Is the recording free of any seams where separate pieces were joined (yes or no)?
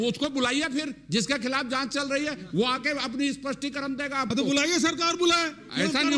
yes